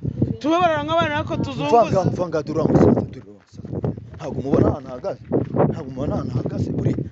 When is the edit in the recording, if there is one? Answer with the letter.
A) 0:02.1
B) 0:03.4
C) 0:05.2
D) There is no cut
D